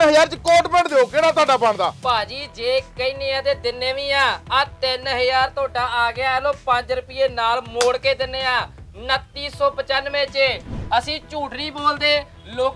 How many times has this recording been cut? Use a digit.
1